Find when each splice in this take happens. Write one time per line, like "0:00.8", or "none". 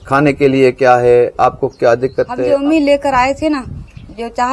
0:02.4

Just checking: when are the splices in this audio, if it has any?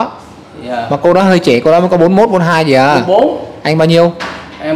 none

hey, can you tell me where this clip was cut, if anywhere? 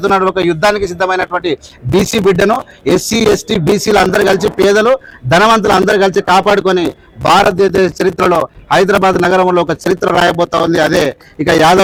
none

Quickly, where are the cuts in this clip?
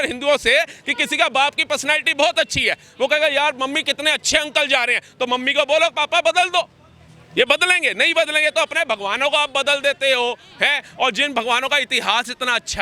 none

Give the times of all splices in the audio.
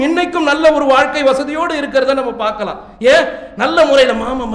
none

